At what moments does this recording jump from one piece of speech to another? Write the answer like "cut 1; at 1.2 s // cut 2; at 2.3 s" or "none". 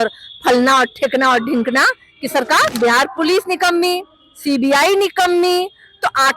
cut 1; at 2.7 s